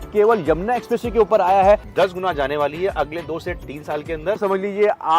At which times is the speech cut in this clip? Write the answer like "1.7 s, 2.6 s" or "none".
1.9 s, 4.4 s